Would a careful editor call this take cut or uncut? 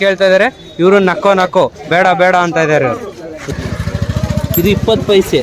cut